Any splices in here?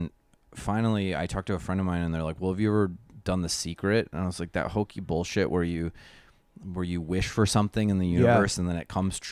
no; 0 cuts

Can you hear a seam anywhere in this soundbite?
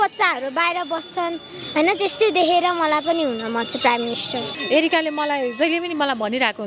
yes; 1 cut; at 4.5 s

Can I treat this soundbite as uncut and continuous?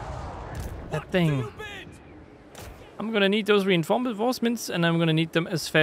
no; 1 cut; at 2.4 s

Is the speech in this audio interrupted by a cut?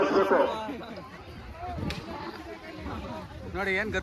no; 0 cuts

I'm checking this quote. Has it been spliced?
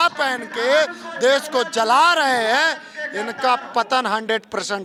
no; 0 cuts

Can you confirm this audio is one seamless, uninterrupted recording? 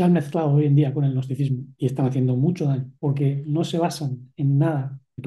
no; 2 cuts; at 1.7 s, 2.9 s

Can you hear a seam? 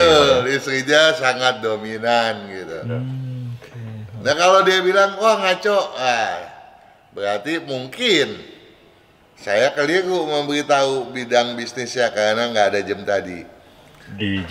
no; 0 cuts

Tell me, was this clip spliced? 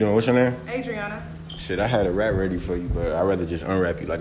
no; 0 cuts

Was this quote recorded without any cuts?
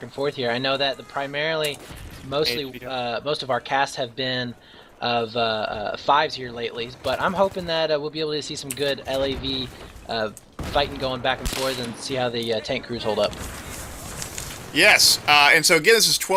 yes; 0 cuts

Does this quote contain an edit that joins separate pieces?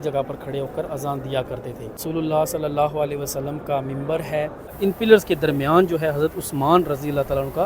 yes; 1 cut; at 4.7 s

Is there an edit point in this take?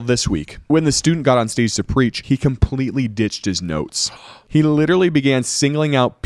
yes; 3 cuts; at 0.7 s, 2.2 s, 4.4 s

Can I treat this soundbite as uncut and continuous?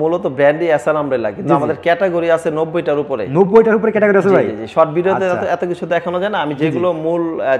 yes; 0 cuts

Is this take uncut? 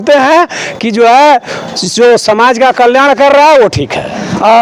yes; 0 cuts

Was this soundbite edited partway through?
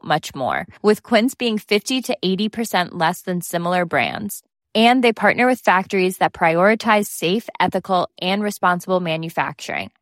no; 0 cuts

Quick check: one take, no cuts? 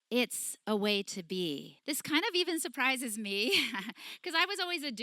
no; 1 cut; at 1.7 s

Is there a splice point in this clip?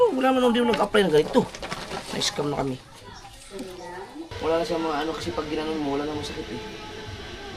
yes; 2 cuts; at 1.7 s, 4.3 s

